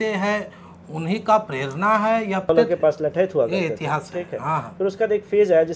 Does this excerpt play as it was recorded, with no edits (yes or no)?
no